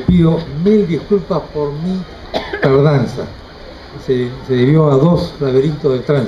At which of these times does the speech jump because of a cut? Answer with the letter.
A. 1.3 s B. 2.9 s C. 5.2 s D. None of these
C